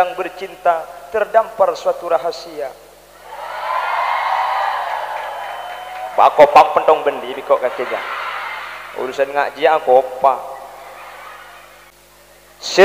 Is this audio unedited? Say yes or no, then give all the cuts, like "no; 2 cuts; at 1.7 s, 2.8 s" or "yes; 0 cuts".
no; 1 cut; at 11.9 s